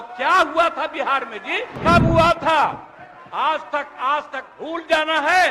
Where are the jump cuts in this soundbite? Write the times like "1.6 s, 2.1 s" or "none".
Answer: 1.8 s